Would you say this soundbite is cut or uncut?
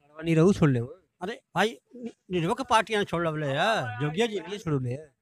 uncut